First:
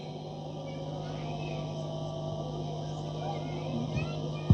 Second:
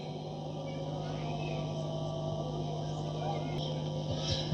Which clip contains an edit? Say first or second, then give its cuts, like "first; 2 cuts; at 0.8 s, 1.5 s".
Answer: second; 1 cut; at 3.6 s